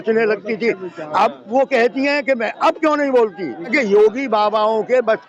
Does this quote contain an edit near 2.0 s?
no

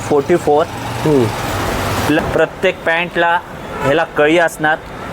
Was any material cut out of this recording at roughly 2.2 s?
yes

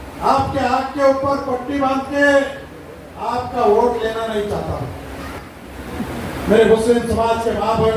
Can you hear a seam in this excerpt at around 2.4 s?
no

